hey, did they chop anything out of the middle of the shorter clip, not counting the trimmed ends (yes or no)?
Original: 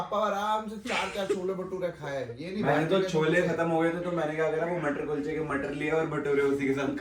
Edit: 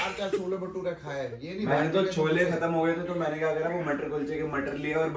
no